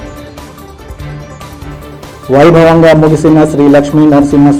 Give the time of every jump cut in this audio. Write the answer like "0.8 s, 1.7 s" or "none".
none